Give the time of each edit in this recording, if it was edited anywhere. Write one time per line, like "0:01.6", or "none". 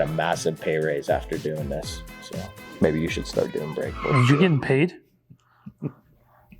none